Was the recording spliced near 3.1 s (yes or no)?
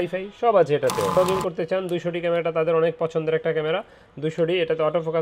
no